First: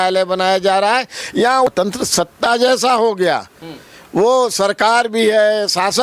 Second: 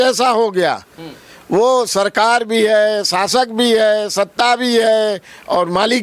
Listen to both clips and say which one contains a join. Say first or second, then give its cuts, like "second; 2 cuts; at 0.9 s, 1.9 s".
first; 1 cut; at 1.7 s